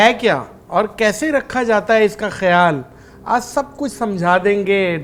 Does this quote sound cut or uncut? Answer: uncut